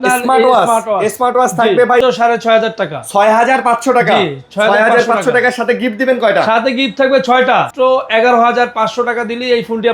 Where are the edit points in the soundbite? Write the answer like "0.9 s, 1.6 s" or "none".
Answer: 2.0 s, 7.7 s